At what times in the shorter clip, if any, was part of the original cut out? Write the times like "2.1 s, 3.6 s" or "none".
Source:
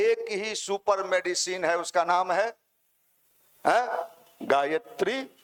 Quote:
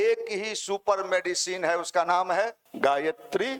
2.6 s